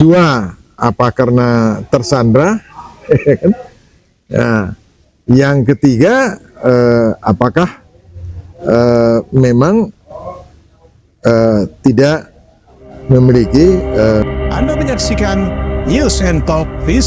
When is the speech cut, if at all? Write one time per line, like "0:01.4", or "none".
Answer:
0:14.2